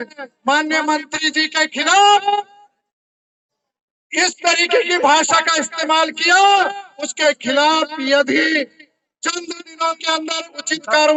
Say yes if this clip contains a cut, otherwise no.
no